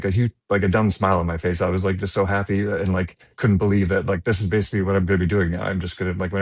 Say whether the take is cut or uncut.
uncut